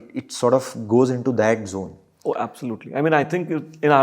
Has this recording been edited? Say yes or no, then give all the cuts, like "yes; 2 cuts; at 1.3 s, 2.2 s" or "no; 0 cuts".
yes; 1 cut; at 2.0 s